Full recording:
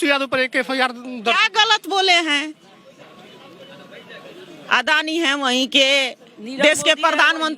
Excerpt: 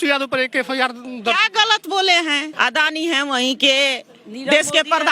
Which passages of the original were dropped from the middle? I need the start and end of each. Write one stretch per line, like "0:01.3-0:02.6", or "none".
0:02.5-0:04.6